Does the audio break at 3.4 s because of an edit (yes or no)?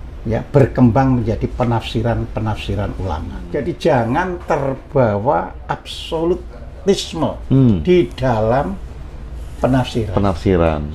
yes